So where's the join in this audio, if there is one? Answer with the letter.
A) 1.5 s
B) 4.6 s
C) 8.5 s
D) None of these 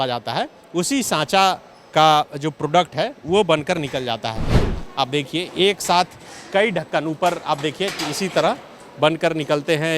B